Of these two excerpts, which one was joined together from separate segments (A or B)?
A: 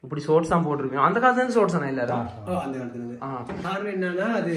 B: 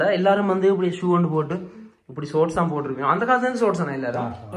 A